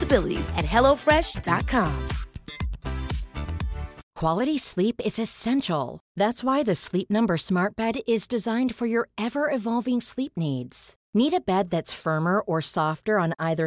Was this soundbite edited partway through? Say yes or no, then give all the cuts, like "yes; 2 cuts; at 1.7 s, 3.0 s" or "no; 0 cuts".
yes; 1 cut; at 4.0 s